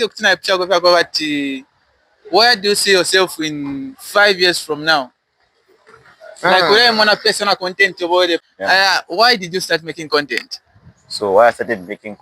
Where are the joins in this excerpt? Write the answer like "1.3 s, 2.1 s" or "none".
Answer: 8.4 s